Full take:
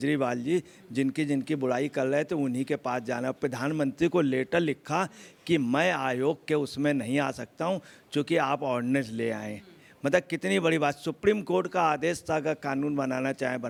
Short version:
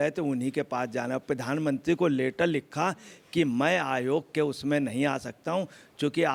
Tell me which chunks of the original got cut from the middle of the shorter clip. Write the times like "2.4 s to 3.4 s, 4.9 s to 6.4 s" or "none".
none